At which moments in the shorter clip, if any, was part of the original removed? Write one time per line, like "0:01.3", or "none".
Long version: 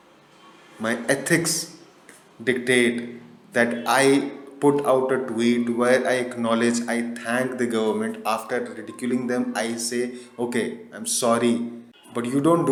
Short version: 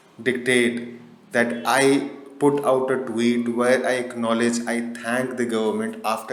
none